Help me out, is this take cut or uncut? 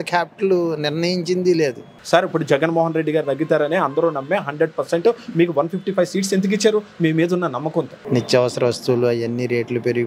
cut